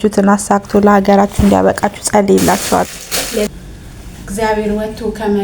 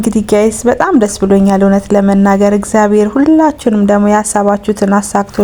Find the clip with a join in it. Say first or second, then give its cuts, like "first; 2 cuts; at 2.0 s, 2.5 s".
first; 1 cut; at 3.5 s